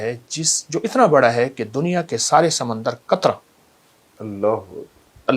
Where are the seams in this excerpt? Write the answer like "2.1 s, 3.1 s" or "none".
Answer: none